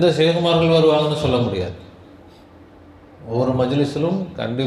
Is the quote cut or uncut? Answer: uncut